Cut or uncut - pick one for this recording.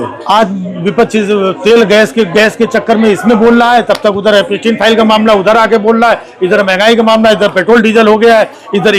uncut